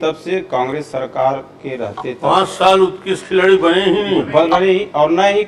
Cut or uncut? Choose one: uncut